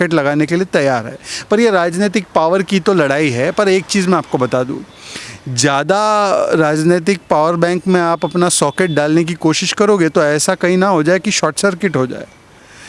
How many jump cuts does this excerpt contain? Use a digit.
0